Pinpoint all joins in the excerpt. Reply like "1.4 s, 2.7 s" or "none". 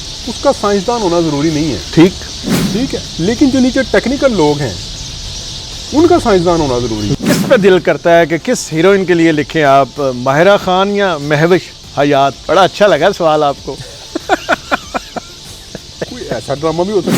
7.0 s, 12.4 s